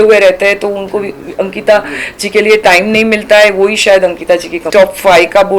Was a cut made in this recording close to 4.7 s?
yes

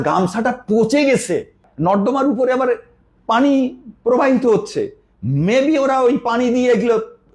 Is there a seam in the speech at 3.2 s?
no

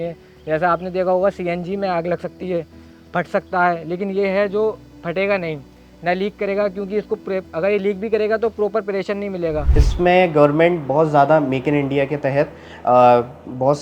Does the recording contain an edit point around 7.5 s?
no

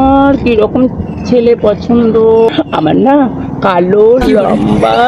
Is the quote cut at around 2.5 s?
yes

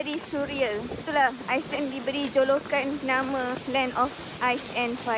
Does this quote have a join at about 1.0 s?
yes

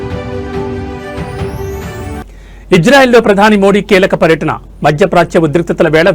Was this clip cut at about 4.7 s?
no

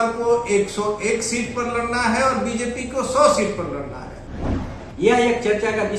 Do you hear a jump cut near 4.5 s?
yes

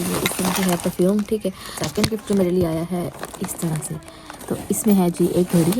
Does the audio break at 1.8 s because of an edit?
yes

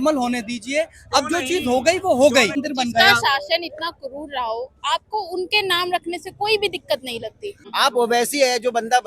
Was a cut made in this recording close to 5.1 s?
no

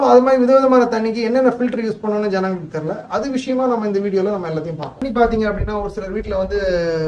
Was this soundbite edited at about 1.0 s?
no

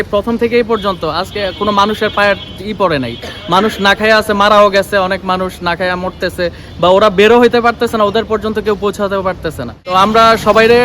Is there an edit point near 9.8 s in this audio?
yes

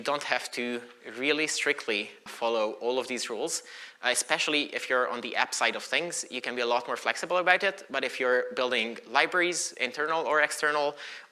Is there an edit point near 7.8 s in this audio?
no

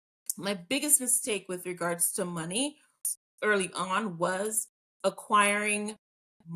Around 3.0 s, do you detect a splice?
yes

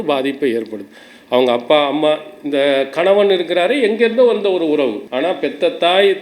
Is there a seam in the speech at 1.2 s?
no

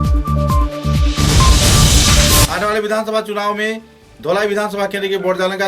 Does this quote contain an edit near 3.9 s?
no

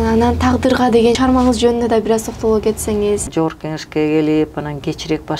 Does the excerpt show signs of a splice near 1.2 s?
yes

